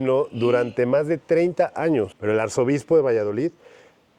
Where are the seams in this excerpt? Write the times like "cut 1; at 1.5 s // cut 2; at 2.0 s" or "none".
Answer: cut 1; at 2.1 s